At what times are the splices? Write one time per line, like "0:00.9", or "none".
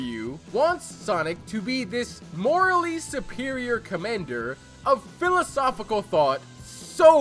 none